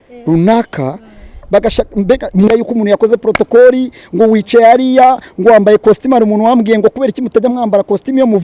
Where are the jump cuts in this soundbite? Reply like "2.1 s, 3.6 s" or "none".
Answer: 2.5 s